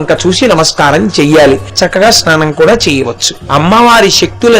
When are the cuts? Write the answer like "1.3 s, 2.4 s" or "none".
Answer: 1.7 s, 3.4 s